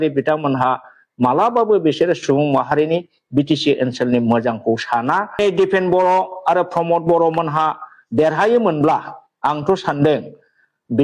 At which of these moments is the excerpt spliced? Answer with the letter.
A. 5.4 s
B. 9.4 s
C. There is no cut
A